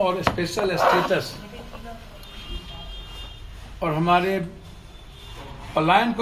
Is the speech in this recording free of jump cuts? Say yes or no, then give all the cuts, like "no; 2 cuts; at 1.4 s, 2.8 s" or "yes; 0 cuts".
yes; 0 cuts